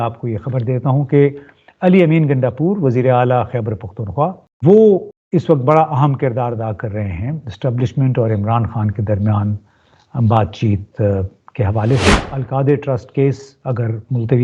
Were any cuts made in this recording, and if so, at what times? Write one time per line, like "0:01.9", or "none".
0:04.5
0:05.1
0:12.3